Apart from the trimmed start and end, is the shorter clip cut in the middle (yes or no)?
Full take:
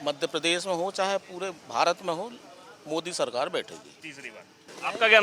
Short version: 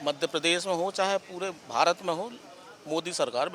no